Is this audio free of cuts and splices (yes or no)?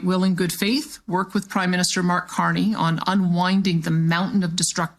yes